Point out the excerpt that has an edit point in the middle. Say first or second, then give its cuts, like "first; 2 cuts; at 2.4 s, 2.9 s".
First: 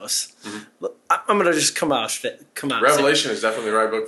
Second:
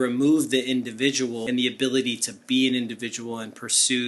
second; 1 cut; at 1.4 s